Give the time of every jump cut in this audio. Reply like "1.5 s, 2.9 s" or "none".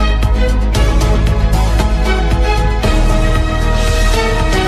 none